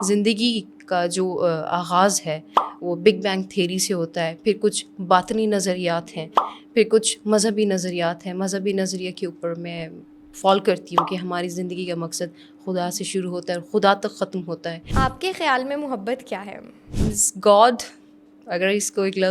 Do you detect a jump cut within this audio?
yes; 2 cuts; at 14.9 s, 16.8 s

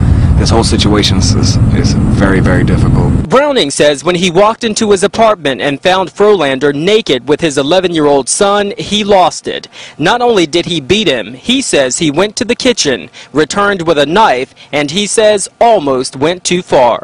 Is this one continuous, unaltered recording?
no; 1 cut; at 9.9 s

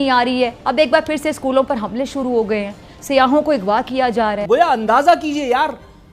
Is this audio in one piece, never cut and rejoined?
no; 1 cut; at 4.4 s

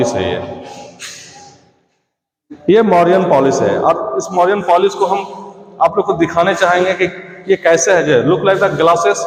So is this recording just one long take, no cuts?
yes; 0 cuts

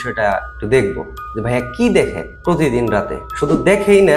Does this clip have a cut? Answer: yes; 1 cut; at 3.2 s

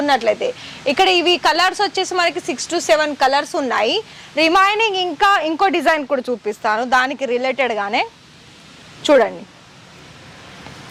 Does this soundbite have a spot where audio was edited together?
no; 0 cuts

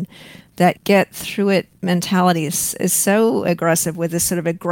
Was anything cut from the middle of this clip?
yes; 2 cuts; at 0.8 s, 1.7 s

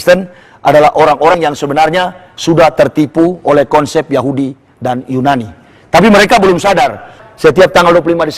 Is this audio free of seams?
no; 2 cuts; at 1.3 s, 7.2 s

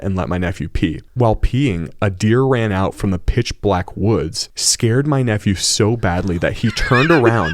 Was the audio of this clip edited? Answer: no; 0 cuts

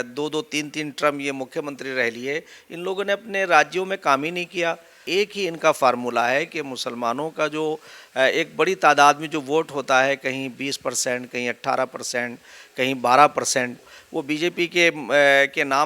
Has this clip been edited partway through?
yes; 2 cuts; at 5.0 s, 13.9 s

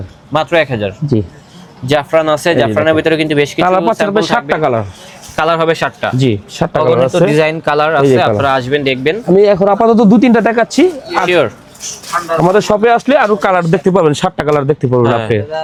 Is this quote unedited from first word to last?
yes; 0 cuts

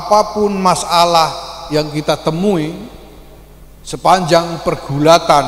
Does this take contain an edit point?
no; 0 cuts

